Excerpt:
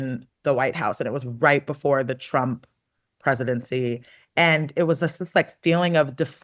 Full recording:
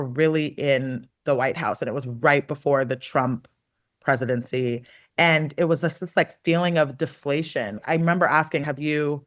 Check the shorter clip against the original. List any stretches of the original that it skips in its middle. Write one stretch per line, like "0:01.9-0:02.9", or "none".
none